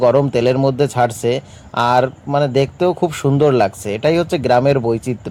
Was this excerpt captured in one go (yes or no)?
yes